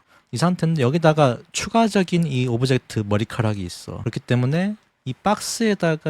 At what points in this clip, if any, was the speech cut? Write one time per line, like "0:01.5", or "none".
none